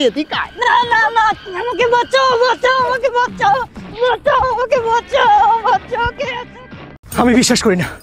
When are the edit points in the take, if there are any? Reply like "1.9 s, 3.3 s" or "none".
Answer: none

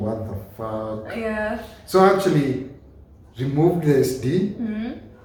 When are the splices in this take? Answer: none

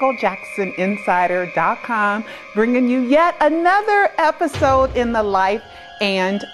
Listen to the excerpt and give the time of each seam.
3.2 s

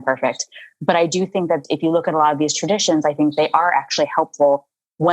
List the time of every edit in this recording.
1.6 s

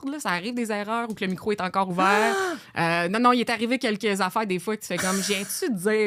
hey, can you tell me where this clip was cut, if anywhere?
none

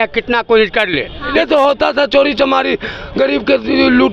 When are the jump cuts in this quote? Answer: 1.3 s

